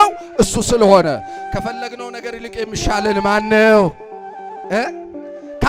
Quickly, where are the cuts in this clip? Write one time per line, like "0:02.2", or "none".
none